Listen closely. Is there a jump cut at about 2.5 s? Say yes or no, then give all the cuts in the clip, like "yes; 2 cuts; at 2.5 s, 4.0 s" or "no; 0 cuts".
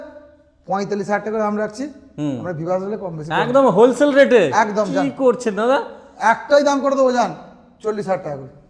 no; 0 cuts